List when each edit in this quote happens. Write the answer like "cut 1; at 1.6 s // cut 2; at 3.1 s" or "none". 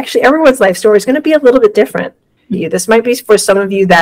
cut 1; at 2.4 s